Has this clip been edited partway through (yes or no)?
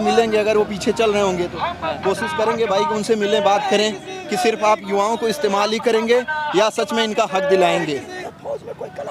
yes